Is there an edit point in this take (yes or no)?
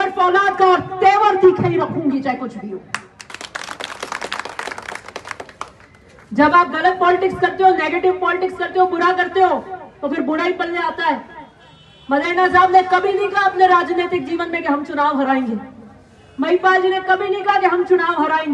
no